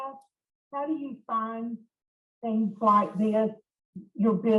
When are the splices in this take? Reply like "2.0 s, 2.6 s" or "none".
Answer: none